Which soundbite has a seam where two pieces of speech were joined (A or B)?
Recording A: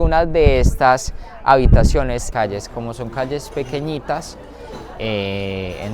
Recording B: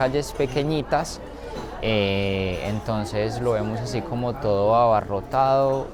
A